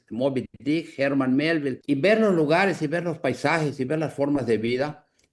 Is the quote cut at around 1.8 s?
yes; 1 cut; at 1.8 s

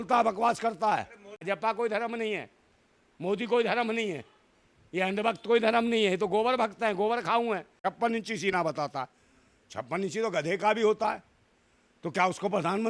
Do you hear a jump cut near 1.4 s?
yes; 2 cuts; at 1.4 s, 7.8 s

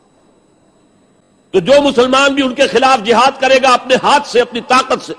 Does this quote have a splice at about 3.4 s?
no; 1 cut; at 1.2 s

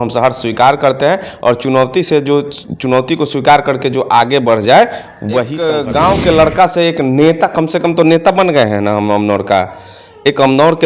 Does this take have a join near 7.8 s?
no; 1 cut; at 5.5 s

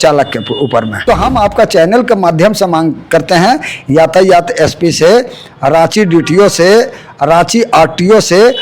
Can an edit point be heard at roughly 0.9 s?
yes; 1 cut; at 0.9 s

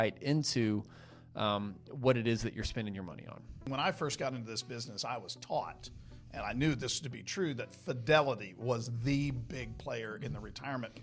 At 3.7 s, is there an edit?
yes; 1 cut; at 3.7 s

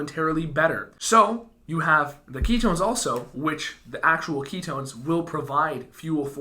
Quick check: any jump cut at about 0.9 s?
yes; 1 cut; at 0.9 s

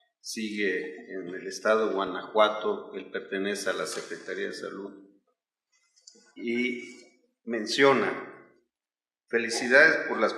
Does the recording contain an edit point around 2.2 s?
yes; 1 cut; at 2.2 s

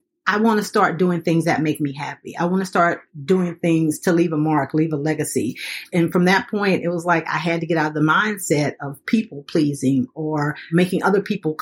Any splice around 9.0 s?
no; 2 cuts; at 5.8 s, 10.7 s

